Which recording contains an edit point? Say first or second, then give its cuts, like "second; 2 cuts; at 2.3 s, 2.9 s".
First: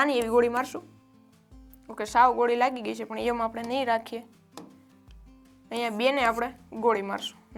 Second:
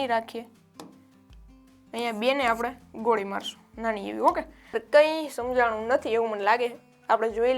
second; 1 cut; at 4.7 s